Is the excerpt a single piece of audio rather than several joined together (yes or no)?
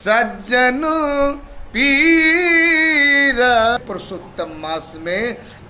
no